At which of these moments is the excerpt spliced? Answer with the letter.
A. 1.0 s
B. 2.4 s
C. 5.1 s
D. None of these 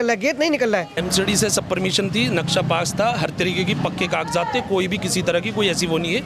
A